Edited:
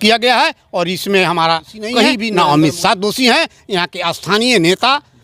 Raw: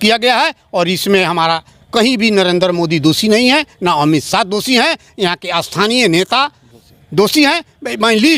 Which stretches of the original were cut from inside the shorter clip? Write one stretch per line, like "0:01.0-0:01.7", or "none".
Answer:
0:02.2-0:03.7